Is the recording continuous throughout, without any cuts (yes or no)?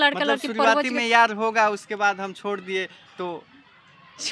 yes